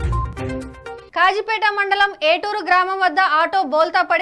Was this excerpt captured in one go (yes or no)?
no